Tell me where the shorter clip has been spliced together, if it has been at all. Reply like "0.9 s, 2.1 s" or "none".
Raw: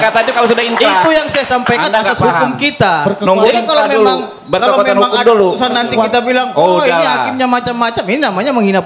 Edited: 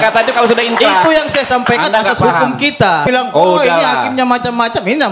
3.0 s